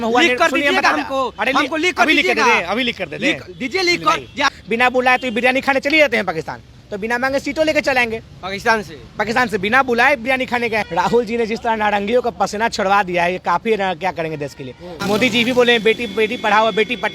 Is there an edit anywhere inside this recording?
yes; 3 cuts; at 4.4 s, 10.9 s, 15.0 s

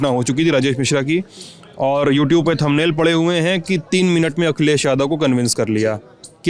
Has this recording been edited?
no; 0 cuts

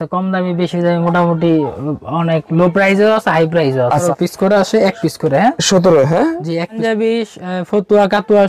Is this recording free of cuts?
no; 2 cuts; at 4.0 s, 6.8 s

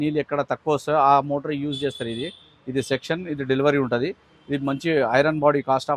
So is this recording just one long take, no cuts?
yes; 0 cuts

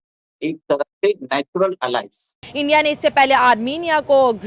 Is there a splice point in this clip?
yes; 1 cut; at 2.4 s

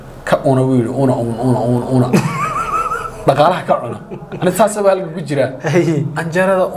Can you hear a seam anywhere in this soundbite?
no; 0 cuts

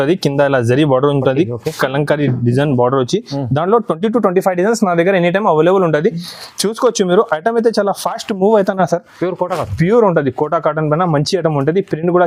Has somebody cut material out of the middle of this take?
no; 0 cuts

